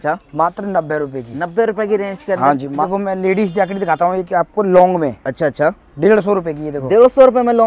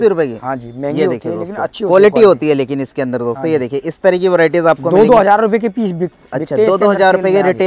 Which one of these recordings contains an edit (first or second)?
first